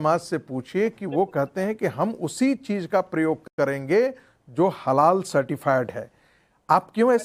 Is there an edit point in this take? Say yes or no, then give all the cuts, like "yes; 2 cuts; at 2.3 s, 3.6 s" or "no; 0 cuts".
no; 0 cuts